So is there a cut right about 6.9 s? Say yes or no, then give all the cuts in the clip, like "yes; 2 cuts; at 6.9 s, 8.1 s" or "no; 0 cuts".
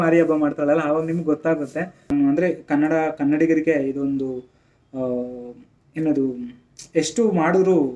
no; 1 cut; at 2.1 s